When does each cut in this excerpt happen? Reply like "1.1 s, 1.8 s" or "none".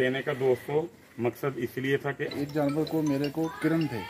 2.3 s